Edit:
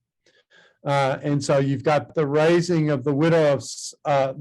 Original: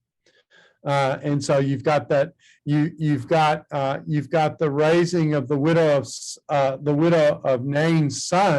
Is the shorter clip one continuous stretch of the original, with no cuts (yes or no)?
no